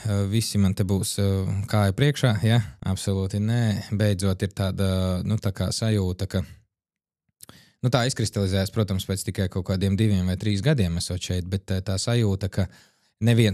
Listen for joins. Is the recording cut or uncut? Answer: uncut